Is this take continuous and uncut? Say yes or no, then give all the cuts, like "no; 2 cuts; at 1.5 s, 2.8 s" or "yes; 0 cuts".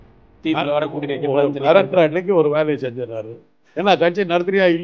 yes; 0 cuts